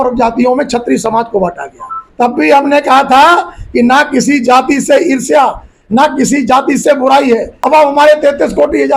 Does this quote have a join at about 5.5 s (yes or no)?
no